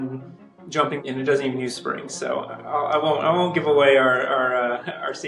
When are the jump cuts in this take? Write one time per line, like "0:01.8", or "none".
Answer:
0:01.0